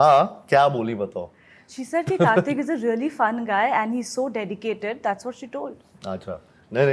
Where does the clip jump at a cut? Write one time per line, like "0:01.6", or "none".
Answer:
none